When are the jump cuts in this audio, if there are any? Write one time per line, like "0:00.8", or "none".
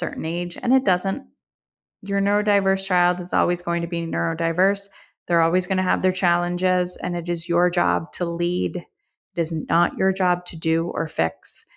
none